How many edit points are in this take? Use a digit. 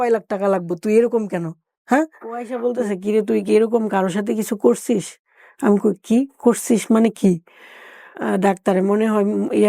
2